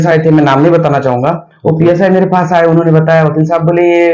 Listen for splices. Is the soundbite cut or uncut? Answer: uncut